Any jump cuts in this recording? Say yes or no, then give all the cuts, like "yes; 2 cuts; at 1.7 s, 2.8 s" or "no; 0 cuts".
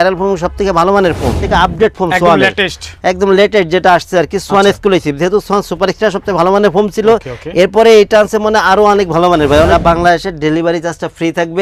yes; 2 cuts; at 1.4 s, 9.7 s